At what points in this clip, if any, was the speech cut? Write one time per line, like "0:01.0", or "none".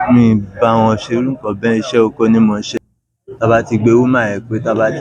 0:02.7